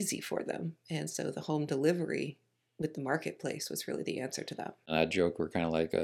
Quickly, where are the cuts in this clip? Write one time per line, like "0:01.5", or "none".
0:04.9